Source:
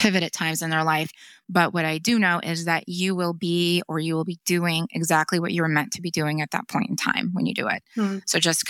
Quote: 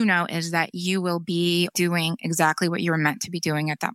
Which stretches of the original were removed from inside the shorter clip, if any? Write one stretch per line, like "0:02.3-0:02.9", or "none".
0:03.9-0:04.4